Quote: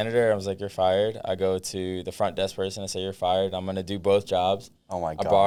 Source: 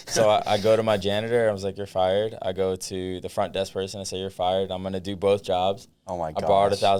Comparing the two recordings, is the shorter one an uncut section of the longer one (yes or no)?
yes